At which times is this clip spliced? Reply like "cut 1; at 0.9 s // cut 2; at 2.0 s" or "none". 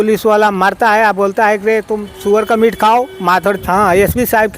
cut 1; at 3.6 s